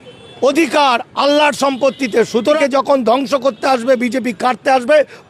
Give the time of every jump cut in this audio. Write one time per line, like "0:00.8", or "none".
0:02.6